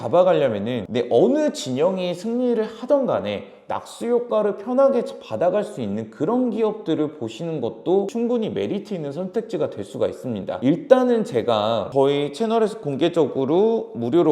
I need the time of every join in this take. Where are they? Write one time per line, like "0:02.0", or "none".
0:00.9
0:08.1